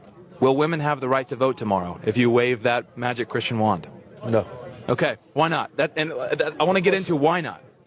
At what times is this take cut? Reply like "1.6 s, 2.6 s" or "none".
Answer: 6.8 s